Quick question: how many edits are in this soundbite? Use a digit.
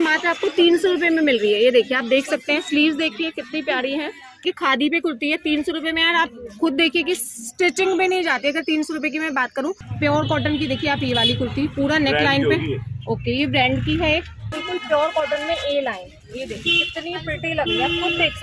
3